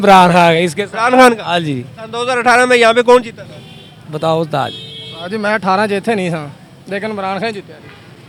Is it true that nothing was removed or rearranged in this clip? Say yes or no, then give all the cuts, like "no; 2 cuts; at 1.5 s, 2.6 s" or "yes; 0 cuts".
yes; 0 cuts